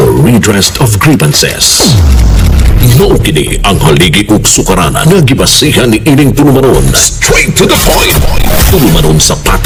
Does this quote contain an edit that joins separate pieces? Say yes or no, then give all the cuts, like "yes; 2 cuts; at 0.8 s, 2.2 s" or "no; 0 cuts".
no; 0 cuts